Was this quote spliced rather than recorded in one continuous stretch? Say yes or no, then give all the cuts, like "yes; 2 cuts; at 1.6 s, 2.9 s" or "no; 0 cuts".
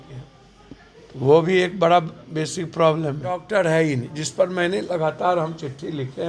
yes; 1 cut; at 3.4 s